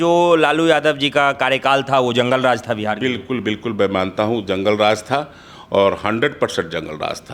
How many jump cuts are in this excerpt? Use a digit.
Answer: 0